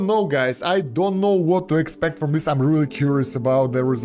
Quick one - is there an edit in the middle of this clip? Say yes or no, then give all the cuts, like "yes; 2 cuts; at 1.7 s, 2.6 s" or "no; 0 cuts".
no; 0 cuts